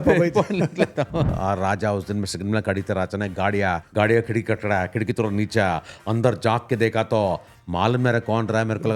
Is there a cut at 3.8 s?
yes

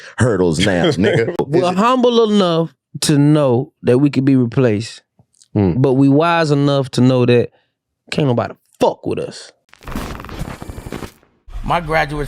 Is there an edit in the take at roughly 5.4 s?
no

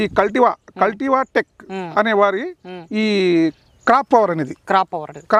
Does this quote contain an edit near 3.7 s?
no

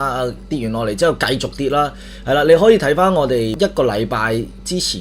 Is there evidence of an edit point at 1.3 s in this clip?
no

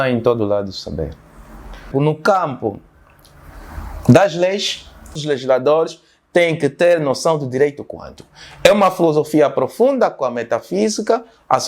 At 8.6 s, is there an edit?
no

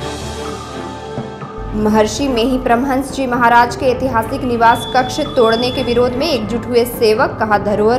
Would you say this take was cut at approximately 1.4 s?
yes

